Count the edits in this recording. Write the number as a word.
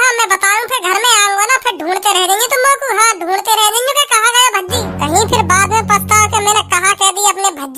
one